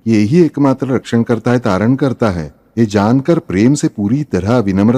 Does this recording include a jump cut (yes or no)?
no